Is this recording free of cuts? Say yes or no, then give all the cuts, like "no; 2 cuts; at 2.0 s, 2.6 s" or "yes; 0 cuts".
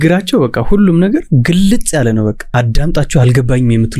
no; 1 cut; at 2.4 s